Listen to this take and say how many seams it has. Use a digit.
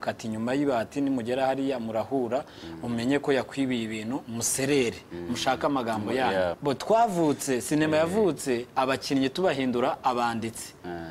1